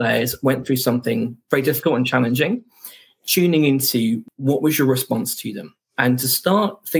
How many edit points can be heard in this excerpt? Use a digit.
1